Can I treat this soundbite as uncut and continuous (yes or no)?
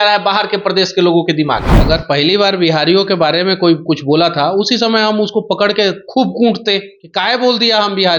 no